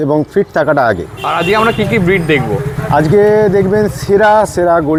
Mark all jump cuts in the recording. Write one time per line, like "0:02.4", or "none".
none